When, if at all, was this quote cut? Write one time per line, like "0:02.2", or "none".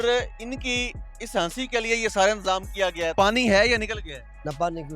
0:03.1